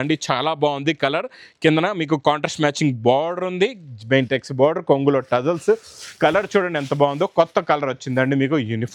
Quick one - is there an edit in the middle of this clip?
no; 0 cuts

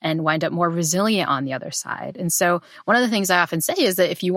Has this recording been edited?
no; 0 cuts

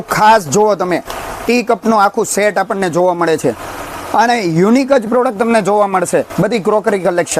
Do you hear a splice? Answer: no; 0 cuts

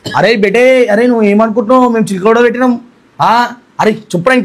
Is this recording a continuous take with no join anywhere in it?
yes; 0 cuts

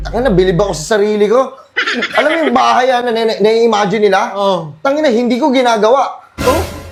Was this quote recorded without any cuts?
yes; 0 cuts

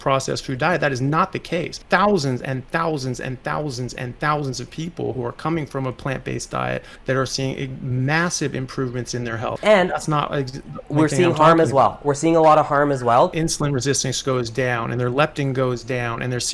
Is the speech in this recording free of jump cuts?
no; 4 cuts; at 1.8 s, 6.9 s, 9.5 s, 13.3 s

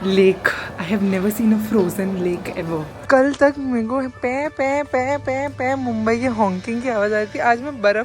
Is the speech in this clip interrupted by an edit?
yes; 1 cut; at 2.9 s

